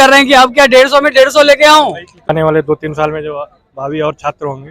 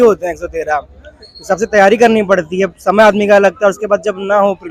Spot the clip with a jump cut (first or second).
first